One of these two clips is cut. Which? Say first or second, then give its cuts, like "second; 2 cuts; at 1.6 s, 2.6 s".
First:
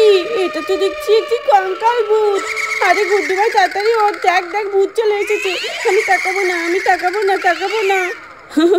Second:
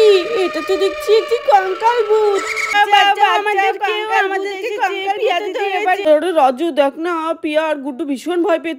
second; 2 cuts; at 2.7 s, 6.1 s